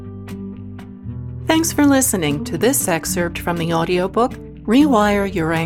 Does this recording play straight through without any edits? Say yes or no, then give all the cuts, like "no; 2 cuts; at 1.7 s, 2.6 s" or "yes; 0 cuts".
yes; 0 cuts